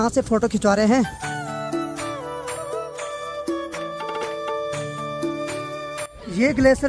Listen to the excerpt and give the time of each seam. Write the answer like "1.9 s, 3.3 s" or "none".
none